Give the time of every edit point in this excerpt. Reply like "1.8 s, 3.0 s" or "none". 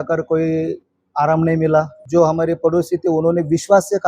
2.0 s